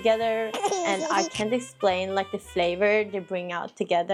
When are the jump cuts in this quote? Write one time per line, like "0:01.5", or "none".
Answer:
none